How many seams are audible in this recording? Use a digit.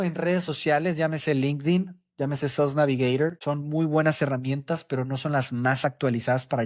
1